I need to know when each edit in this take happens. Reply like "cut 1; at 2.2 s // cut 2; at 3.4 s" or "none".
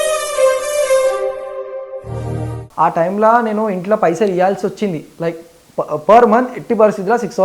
cut 1; at 2.6 s